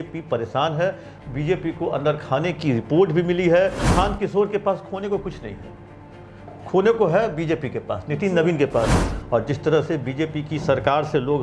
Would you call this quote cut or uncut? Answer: cut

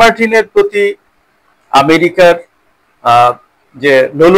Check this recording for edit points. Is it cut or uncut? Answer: uncut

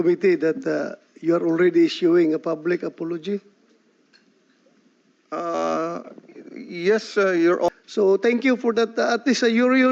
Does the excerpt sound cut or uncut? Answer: cut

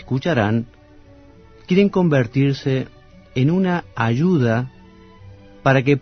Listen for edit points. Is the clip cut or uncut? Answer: uncut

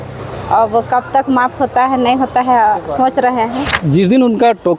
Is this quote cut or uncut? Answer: cut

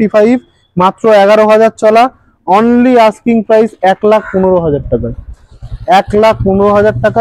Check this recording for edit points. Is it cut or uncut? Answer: uncut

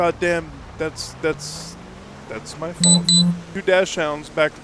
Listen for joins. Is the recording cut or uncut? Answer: cut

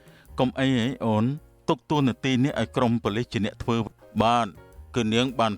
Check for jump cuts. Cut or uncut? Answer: cut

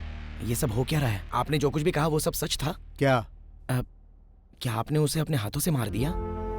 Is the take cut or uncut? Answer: cut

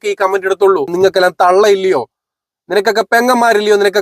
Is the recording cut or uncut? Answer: cut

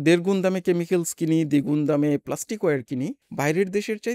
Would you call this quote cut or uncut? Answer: cut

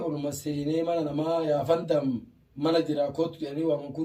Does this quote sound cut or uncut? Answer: uncut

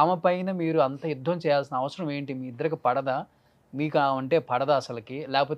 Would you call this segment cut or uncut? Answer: uncut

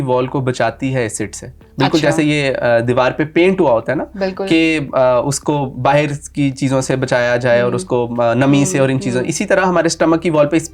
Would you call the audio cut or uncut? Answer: uncut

